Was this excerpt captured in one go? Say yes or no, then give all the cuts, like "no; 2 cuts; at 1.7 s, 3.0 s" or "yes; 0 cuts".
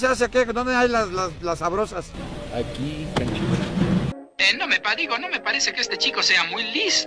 yes; 0 cuts